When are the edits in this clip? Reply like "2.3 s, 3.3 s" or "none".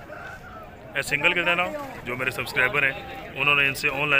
2.0 s